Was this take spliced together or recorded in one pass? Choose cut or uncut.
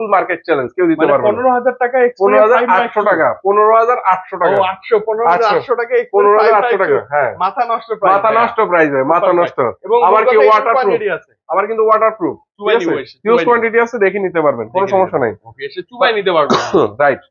uncut